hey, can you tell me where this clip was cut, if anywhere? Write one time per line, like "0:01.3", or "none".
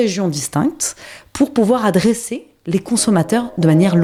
none